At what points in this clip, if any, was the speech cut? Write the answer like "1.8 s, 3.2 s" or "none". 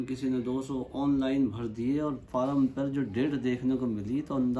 none